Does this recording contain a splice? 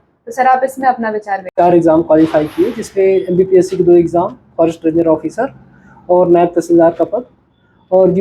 yes; 1 cut; at 1.5 s

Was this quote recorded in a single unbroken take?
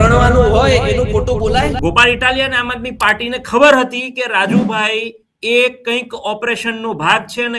no; 1 cut; at 1.8 s

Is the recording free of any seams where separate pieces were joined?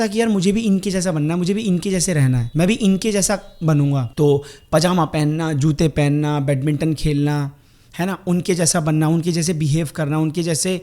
no; 2 cuts; at 2.4 s, 4.1 s

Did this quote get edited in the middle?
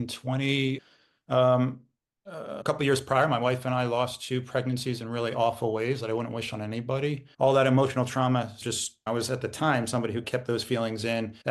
no; 0 cuts

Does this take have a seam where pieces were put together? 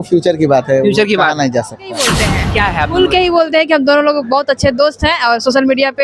yes; 1 cut; at 2.2 s

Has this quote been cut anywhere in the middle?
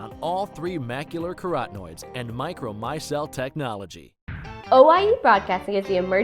yes; 1 cut; at 4.3 s

